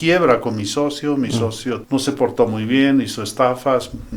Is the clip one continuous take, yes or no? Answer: no